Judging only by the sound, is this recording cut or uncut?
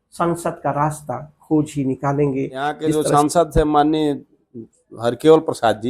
cut